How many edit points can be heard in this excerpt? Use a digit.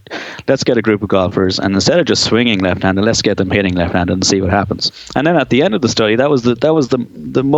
1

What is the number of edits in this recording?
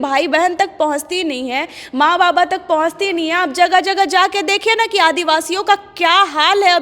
0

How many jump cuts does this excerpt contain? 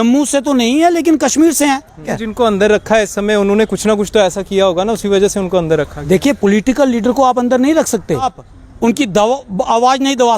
2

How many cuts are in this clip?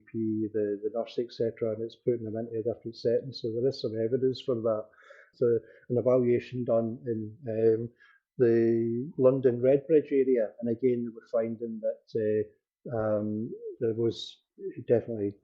1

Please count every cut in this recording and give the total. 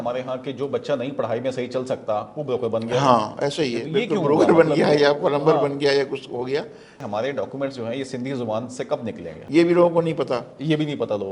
2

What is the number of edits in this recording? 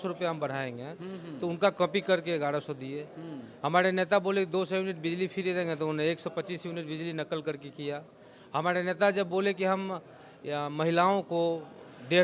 0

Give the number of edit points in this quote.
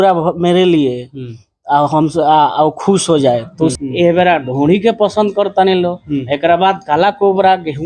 1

